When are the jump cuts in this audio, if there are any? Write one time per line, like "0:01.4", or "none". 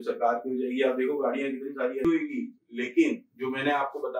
0:02.0